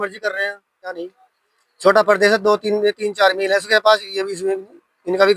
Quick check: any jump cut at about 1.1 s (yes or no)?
yes